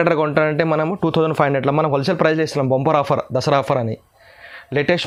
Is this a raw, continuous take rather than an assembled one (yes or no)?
yes